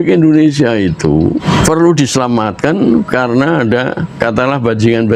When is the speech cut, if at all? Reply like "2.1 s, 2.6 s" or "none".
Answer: 1.4 s, 4.2 s